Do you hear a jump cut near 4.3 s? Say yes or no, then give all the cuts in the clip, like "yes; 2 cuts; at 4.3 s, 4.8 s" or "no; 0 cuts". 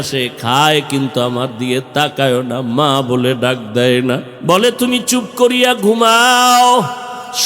yes; 1 cut; at 4.3 s